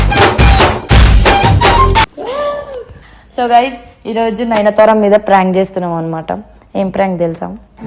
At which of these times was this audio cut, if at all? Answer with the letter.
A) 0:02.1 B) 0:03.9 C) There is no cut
C